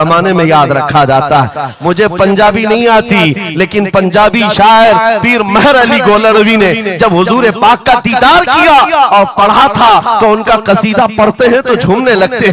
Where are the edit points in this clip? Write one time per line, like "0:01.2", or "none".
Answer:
none